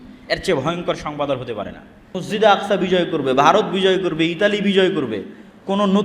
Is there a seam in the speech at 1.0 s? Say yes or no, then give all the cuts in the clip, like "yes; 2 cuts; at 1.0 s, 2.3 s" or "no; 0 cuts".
no; 1 cut; at 2.2 s